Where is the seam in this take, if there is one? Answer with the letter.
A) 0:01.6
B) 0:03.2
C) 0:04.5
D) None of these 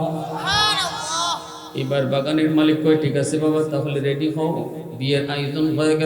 A